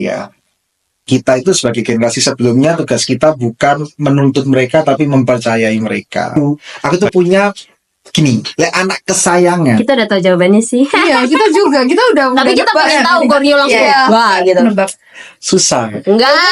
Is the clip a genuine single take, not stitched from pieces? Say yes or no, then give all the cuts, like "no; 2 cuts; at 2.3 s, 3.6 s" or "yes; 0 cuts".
no; 1 cut; at 6.7 s